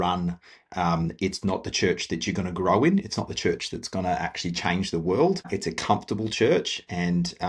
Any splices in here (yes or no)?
yes